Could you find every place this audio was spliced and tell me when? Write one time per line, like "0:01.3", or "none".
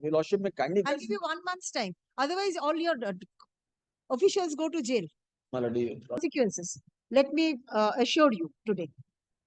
0:06.2